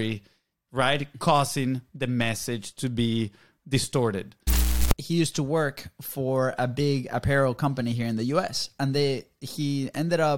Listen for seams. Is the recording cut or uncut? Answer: cut